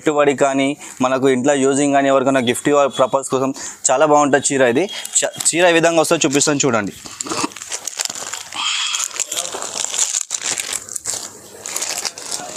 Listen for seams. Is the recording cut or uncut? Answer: uncut